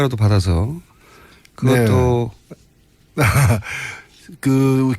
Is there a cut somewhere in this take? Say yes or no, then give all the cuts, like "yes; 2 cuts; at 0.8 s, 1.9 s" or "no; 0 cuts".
yes; 1 cut; at 4.0 s